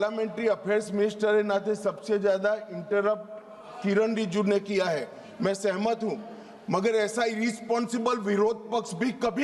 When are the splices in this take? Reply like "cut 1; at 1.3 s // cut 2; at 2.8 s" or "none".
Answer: none